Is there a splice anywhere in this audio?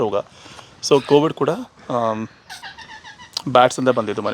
no; 0 cuts

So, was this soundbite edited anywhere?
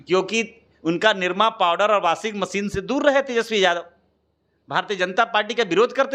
no; 0 cuts

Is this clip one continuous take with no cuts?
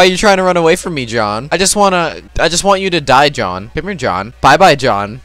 no; 1 cut; at 4.3 s

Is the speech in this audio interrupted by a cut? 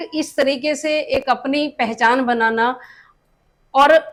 no; 0 cuts

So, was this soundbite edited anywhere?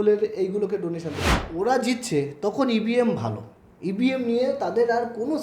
yes; 1 cut; at 1.2 s

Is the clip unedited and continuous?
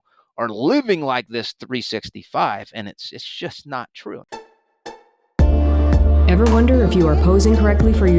no; 1 cut; at 4.2 s

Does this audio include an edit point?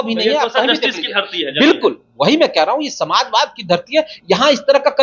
no; 0 cuts

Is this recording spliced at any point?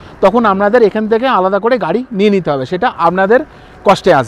no; 0 cuts

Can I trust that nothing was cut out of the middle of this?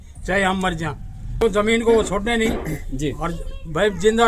no; 1 cut; at 1.4 s

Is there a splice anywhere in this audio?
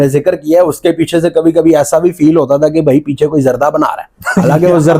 no; 0 cuts

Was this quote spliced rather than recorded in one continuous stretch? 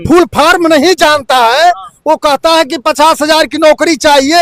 no; 0 cuts

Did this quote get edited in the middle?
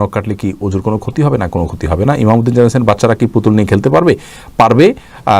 no; 0 cuts

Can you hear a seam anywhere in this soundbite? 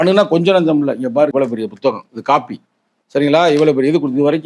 yes; 1 cut; at 1.3 s

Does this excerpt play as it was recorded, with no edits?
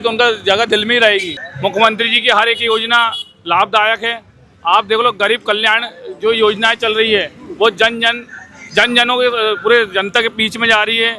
no; 1 cut; at 1.4 s

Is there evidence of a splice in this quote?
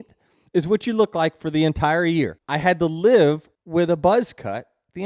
yes; 2 cuts; at 2.4 s, 3.5 s

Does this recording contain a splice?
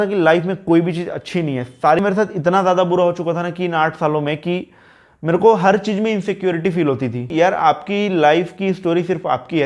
yes; 2 cuts; at 2.0 s, 7.3 s

